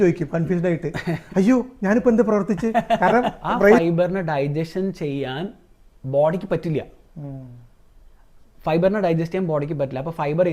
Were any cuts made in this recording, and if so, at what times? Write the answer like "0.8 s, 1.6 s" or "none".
3.8 s

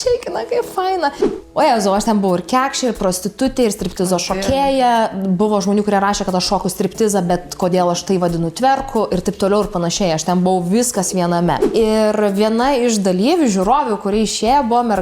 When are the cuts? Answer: 1.2 s, 11.6 s

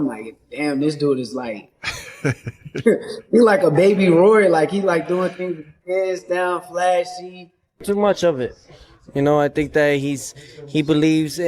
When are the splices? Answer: 7.8 s

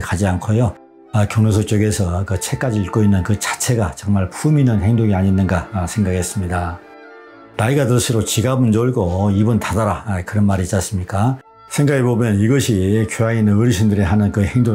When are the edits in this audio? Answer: none

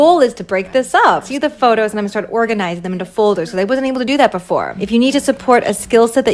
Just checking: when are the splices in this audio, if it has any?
1.3 s, 4.8 s

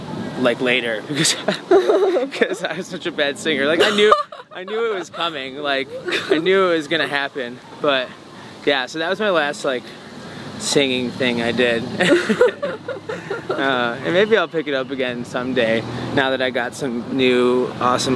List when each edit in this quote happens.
none

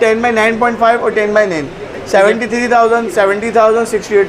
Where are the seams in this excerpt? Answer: 2.0 s

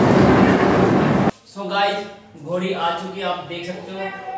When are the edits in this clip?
1.3 s

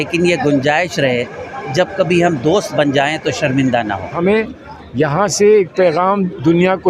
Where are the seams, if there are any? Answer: 4.1 s

